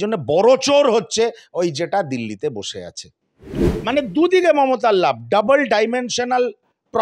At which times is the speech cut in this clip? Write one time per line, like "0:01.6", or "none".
0:03.7